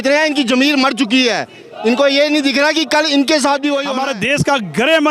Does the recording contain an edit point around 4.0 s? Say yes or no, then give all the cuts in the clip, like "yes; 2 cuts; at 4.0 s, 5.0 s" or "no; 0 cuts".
yes; 1 cut; at 4.0 s